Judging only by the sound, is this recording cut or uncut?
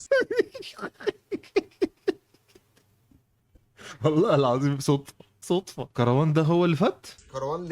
uncut